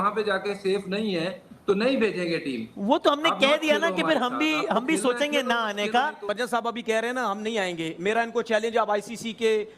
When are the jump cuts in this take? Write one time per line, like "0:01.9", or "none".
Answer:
0:06.2